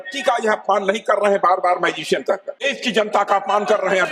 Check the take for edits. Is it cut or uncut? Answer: cut